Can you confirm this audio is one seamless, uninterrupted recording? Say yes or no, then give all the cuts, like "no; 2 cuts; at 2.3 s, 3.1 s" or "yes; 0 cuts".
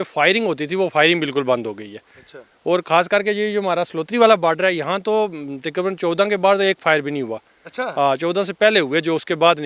yes; 0 cuts